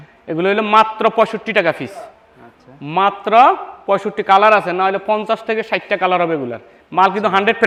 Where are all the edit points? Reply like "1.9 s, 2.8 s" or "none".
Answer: none